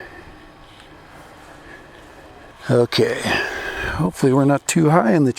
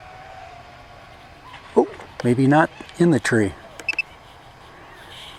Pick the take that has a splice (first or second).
first